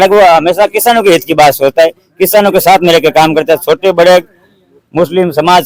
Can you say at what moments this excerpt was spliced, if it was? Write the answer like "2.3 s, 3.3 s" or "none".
none